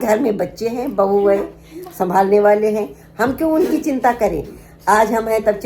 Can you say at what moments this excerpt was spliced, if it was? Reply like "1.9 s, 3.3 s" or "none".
none